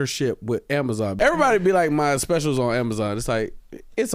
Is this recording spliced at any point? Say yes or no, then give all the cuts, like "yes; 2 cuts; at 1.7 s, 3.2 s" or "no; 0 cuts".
yes; 1 cut; at 1.1 s